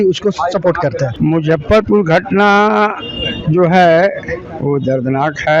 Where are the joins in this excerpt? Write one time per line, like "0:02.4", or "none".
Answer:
0:01.1